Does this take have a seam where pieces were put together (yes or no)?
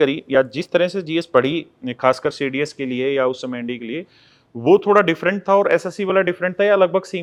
no